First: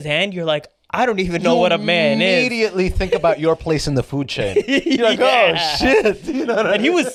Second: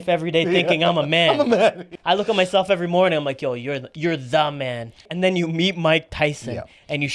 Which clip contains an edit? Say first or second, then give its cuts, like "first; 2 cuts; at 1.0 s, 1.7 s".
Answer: second; 2 cuts; at 1.9 s, 5.1 s